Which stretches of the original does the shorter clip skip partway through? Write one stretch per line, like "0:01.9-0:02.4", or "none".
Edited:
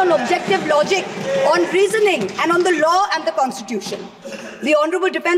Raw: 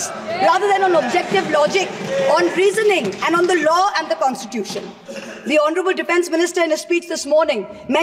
none